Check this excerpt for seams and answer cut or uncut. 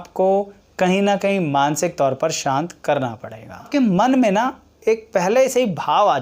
cut